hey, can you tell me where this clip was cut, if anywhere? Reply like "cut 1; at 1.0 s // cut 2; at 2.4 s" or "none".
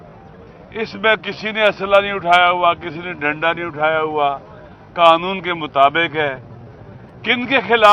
none

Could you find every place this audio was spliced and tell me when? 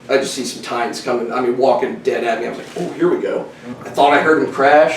cut 1; at 3.6 s

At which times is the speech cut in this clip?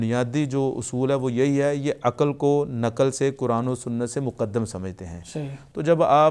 none

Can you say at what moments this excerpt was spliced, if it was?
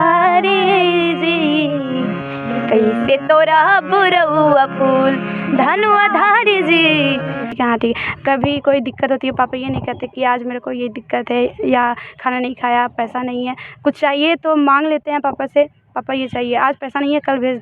cut 1; at 7.5 s

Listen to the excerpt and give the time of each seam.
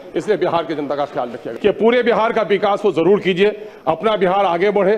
cut 1; at 1.5 s

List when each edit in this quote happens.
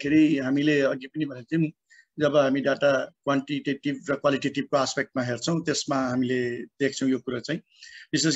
none

